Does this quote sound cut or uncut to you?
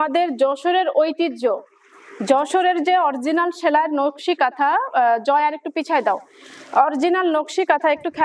uncut